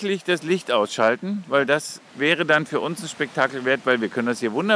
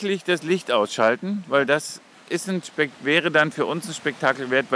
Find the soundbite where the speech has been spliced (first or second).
first